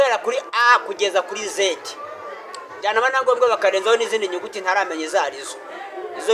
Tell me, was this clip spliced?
no; 0 cuts

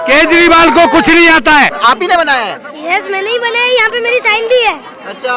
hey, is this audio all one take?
no; 1 cut; at 1.7 s

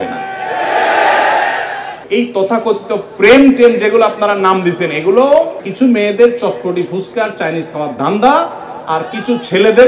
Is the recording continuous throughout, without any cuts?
no; 2 cuts; at 1.9 s, 5.6 s

